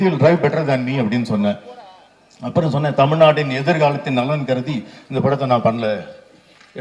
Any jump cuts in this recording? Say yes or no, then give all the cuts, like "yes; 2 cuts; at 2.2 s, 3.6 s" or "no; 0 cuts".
no; 0 cuts